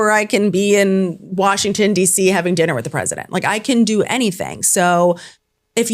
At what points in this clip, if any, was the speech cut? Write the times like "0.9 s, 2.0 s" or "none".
none